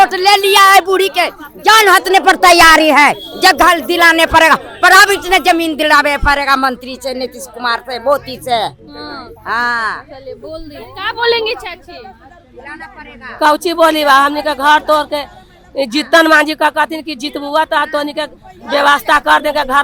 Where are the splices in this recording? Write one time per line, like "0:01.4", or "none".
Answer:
none